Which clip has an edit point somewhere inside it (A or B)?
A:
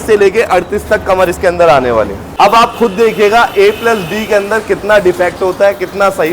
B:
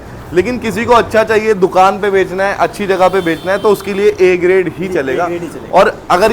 A